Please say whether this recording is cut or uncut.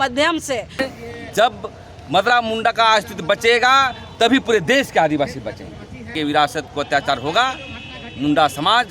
cut